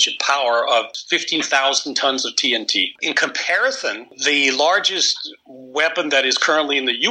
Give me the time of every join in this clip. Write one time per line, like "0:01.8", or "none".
0:01.0
0:03.0
0:04.1